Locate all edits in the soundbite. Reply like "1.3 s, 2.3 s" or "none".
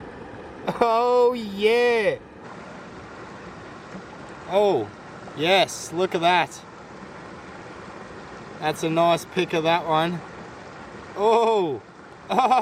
2.4 s